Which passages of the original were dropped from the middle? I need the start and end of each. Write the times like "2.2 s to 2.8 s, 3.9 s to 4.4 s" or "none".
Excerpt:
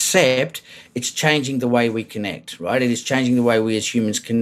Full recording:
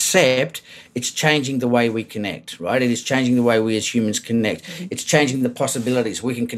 none